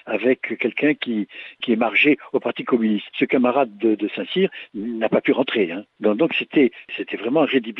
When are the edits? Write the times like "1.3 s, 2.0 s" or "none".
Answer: 1.6 s, 3.1 s, 5.8 s, 6.9 s